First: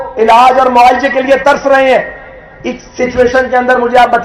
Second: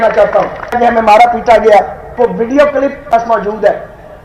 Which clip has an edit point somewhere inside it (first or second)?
second